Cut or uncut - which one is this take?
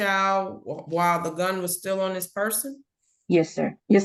uncut